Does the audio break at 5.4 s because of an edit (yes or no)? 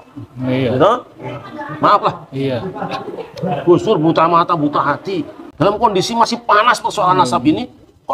yes